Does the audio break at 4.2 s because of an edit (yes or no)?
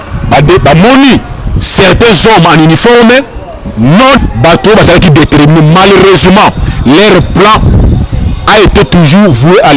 yes